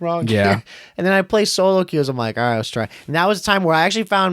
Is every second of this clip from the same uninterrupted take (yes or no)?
yes